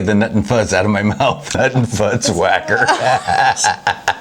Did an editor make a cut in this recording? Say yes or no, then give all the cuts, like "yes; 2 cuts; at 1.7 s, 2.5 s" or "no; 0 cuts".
yes; 1 cut; at 1.5 s